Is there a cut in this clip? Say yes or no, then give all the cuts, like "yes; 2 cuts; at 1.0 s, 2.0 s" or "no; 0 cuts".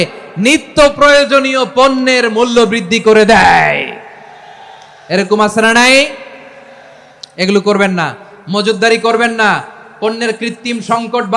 no; 0 cuts